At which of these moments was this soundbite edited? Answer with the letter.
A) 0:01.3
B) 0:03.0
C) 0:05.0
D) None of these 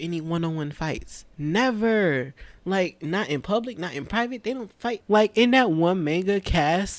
C